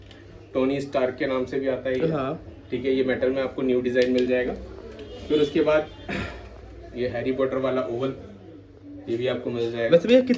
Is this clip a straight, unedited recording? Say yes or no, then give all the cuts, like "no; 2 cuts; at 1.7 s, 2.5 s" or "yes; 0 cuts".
yes; 0 cuts